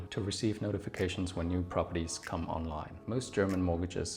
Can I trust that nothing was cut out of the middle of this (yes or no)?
no